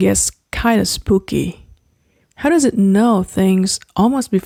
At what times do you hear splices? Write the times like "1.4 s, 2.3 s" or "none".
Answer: none